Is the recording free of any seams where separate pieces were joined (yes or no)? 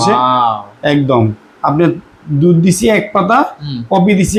yes